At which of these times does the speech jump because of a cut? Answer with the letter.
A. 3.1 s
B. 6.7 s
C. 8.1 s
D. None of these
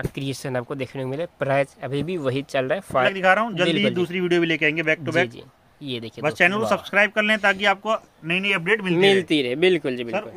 A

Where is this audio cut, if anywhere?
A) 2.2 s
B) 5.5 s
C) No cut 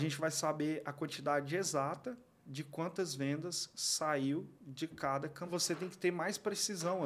B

